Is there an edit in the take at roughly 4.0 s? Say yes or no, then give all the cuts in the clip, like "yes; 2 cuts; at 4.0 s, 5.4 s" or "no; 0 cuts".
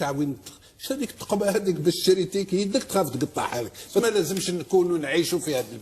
yes; 1 cut; at 4.0 s